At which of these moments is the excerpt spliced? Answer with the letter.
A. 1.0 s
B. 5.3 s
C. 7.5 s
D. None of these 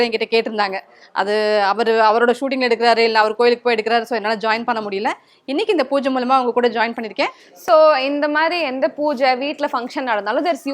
C